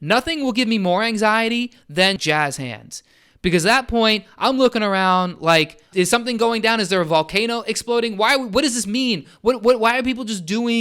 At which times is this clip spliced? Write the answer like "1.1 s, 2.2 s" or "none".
2.2 s, 5.9 s